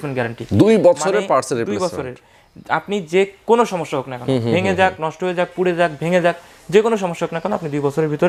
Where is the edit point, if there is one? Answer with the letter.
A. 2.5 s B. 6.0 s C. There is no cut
C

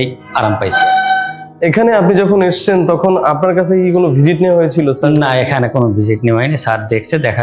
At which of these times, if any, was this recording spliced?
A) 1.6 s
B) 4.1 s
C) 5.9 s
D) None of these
A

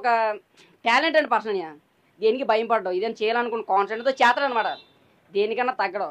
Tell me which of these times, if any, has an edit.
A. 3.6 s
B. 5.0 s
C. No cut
C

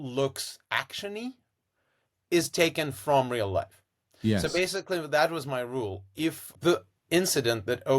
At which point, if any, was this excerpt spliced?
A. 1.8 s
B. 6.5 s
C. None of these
B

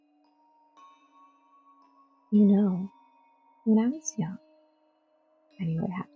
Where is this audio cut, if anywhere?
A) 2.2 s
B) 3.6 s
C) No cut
A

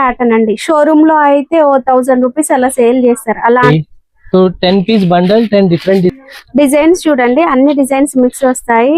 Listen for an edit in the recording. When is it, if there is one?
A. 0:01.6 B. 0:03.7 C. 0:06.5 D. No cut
B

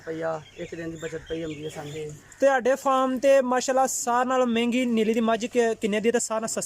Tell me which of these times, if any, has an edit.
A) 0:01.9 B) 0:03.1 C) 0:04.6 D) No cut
A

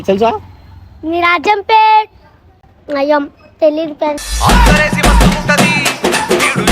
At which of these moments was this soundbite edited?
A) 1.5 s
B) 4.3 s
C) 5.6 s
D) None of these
B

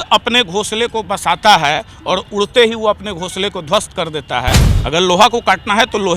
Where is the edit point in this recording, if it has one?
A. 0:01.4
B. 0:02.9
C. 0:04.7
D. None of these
C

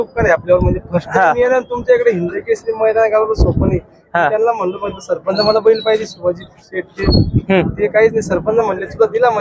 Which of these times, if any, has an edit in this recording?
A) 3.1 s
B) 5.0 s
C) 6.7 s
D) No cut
D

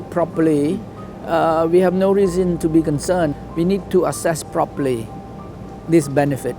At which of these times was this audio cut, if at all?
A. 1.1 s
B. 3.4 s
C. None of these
B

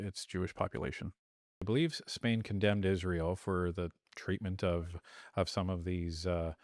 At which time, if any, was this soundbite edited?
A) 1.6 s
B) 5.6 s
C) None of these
A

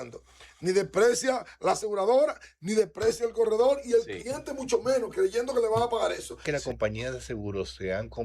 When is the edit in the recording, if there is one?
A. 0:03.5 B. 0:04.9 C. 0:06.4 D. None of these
C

